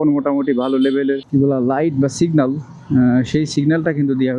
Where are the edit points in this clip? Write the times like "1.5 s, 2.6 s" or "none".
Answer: 1.2 s